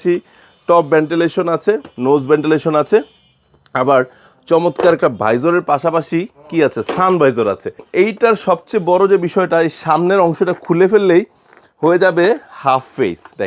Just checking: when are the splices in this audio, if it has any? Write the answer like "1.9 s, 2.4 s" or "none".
7.9 s